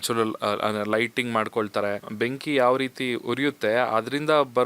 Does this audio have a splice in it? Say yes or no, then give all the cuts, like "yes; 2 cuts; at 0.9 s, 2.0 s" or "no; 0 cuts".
yes; 1 cut; at 2.1 s